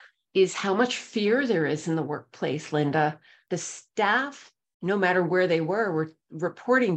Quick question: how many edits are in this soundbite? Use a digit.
1